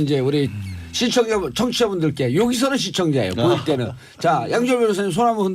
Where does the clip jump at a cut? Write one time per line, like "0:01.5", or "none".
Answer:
0:04.0